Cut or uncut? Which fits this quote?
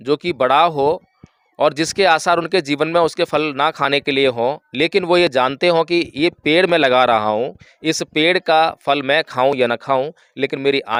uncut